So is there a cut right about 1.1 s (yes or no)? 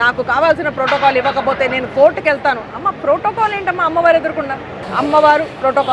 no